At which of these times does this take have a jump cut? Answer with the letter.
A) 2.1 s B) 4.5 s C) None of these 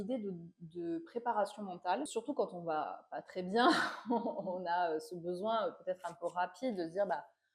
A